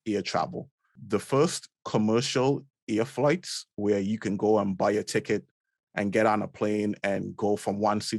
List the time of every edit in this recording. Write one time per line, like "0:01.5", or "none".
0:01.0